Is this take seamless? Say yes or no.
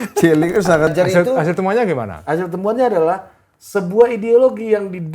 no